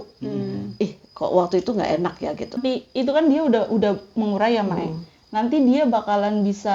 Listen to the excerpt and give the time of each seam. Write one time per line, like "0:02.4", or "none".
0:02.6

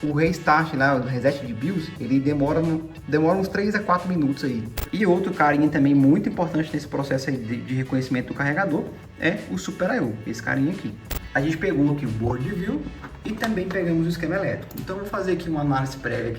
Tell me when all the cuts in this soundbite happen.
0:04.8
0:11.2

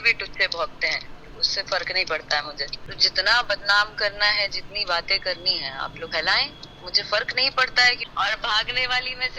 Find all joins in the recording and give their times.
0:02.8
0:08.0

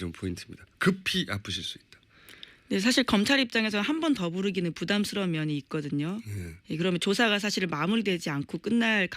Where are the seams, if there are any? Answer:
0:04.6

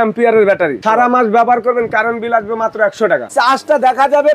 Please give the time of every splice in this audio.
0:00.8
0:03.3

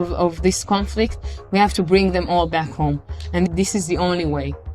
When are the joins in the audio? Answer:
none

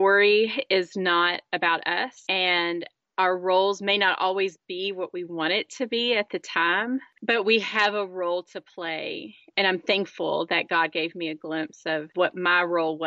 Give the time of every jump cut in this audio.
0:12.1

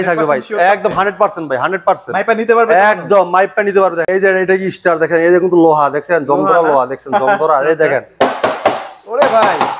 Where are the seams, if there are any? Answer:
0:04.0

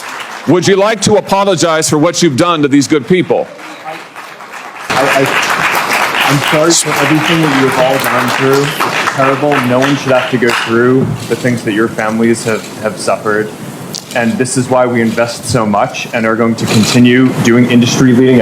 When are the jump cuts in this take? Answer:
0:04.7

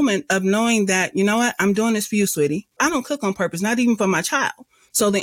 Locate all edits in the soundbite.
0:02.7

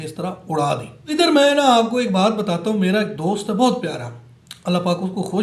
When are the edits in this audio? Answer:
0:01.0

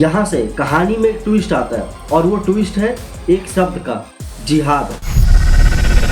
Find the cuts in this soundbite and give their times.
none

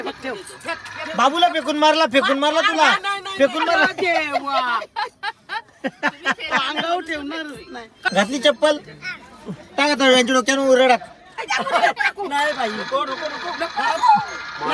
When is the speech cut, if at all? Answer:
0:08.1

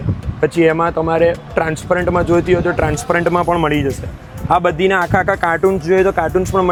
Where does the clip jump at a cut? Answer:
none

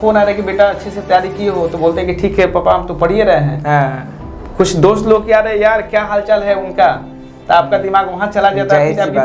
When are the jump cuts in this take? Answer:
none

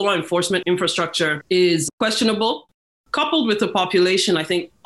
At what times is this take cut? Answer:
0:00.9
0:02.8

